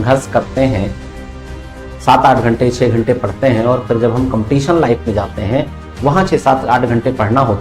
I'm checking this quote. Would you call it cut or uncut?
uncut